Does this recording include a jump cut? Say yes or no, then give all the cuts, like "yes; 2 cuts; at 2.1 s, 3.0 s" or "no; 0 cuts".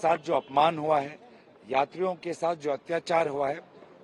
no; 0 cuts